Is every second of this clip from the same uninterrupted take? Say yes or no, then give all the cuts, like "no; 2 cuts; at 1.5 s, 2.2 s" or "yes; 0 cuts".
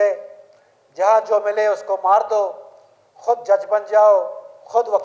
yes; 0 cuts